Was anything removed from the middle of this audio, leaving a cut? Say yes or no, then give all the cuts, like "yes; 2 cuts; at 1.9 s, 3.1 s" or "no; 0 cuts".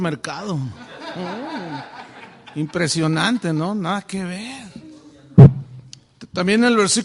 yes; 1 cut; at 3.4 s